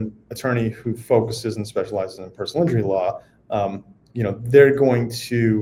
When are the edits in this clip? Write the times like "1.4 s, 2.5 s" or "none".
none